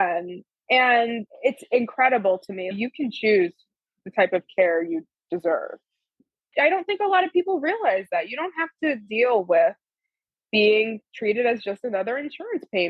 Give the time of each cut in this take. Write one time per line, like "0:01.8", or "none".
0:02.7
0:06.6